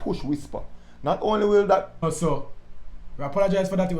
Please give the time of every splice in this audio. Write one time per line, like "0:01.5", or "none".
0:02.0

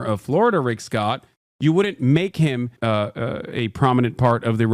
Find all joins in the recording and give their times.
0:02.8

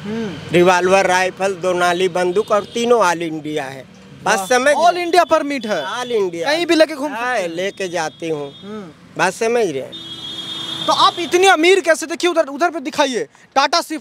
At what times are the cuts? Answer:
none

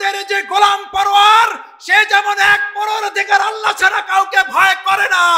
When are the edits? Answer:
none

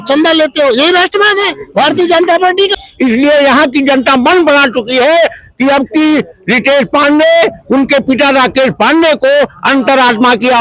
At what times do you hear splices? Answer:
0:02.8

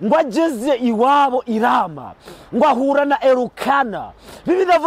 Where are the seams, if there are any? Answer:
none

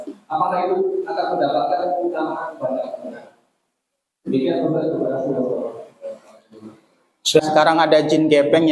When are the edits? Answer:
0:07.5

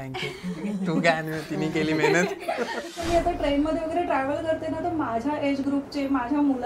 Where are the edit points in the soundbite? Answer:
0:02.9

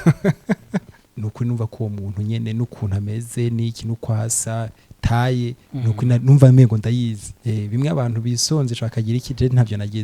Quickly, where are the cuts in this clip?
0:01.0
0:07.3

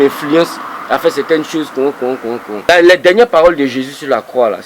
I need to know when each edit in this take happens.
0:02.5

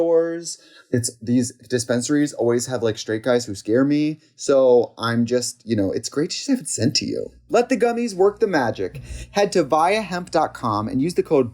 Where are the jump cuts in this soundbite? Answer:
0:07.4

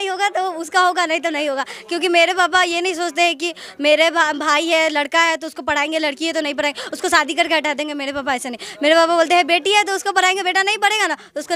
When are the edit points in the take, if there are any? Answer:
none

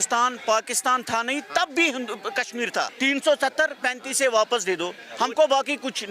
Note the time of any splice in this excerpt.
0:02.9

